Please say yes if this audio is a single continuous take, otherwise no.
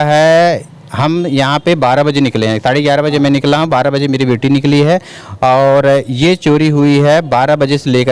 yes